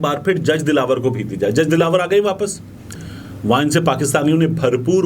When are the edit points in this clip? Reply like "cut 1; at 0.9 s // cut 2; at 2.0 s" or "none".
cut 1; at 2.9 s